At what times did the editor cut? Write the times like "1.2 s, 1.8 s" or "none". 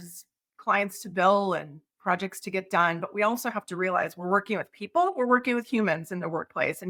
none